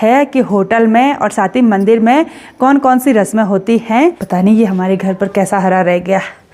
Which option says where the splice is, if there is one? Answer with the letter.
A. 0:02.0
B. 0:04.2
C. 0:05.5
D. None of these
B